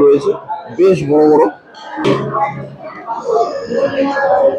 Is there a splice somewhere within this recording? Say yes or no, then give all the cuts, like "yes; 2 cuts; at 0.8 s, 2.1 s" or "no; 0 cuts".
yes; 1 cut; at 2.0 s